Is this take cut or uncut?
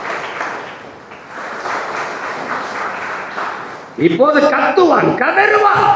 cut